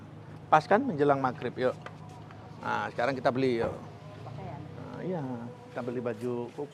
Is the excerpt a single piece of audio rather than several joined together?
yes; 0 cuts

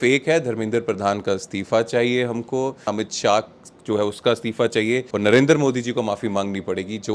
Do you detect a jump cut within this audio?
yes; 2 cuts; at 2.9 s, 5.1 s

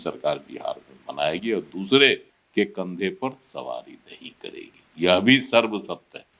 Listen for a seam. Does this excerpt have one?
no; 0 cuts

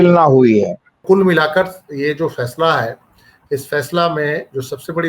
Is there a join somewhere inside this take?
yes; 1 cut; at 1.0 s

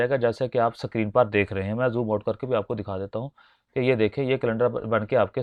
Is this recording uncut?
yes; 0 cuts

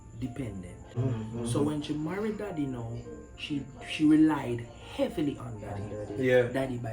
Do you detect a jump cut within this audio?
yes; 1 cut; at 1.0 s

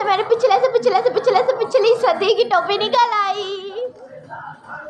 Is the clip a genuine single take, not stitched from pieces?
no; 1 cut; at 3.9 s

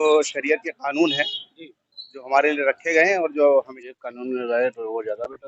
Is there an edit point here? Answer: yes; 1 cut; at 3.8 s

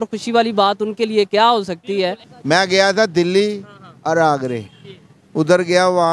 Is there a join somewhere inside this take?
yes; 1 cut; at 2.3 s

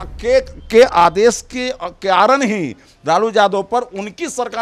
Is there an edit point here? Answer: no; 0 cuts

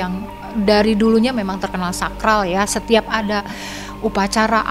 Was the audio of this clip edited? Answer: no; 0 cuts

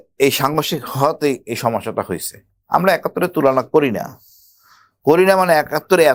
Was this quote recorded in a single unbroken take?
yes; 0 cuts

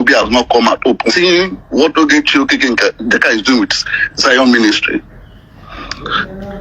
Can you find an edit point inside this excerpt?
yes; 1 cut; at 1.1 s

